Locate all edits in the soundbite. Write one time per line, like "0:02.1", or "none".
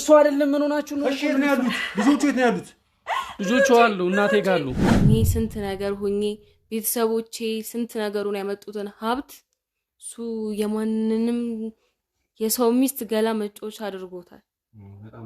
0:04.8